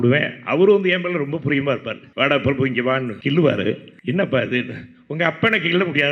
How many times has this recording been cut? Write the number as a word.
three